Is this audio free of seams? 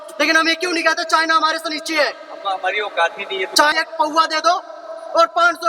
no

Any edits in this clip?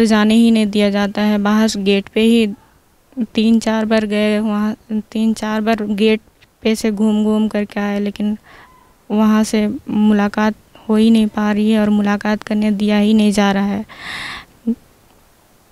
no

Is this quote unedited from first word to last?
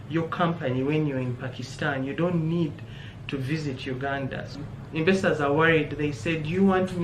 no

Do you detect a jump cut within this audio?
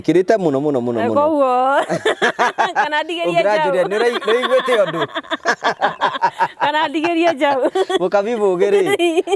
no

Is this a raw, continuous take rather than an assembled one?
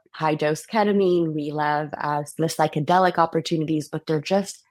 yes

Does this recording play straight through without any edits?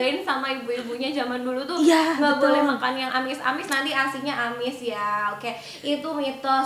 yes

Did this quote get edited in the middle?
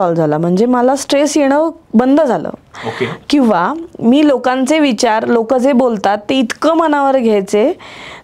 no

